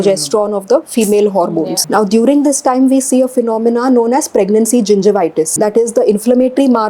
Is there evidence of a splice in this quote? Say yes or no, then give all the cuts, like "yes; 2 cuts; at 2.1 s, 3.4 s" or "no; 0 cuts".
yes; 2 cuts; at 1.8 s, 5.5 s